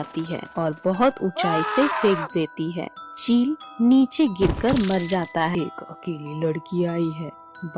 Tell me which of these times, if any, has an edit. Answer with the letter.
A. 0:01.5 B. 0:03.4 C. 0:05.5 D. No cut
C